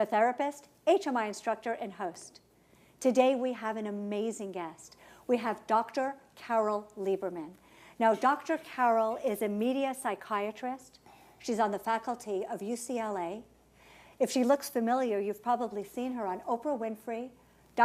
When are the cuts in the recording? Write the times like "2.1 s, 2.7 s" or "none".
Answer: none